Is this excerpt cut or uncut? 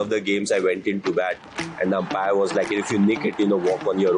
uncut